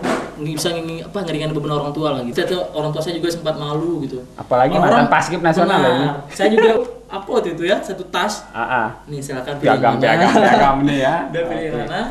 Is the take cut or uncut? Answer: cut